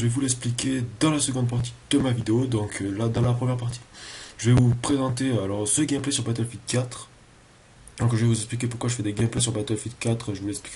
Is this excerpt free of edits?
yes; 0 cuts

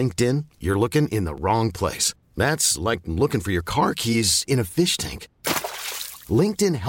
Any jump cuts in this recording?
no; 0 cuts

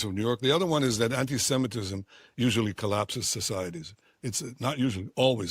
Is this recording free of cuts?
yes; 0 cuts

